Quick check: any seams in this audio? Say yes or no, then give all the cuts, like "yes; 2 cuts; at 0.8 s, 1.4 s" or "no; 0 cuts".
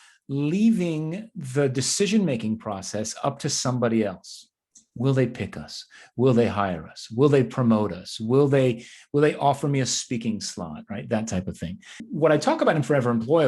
yes; 1 cut; at 12.0 s